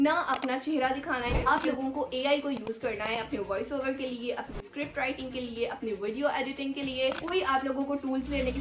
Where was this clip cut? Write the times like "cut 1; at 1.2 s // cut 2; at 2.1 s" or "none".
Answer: cut 1; at 1.4 s // cut 2; at 7.2 s